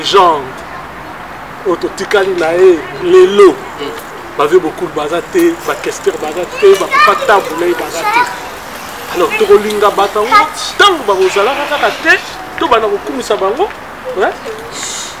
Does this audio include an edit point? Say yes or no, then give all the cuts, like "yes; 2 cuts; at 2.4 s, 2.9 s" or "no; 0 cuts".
no; 0 cuts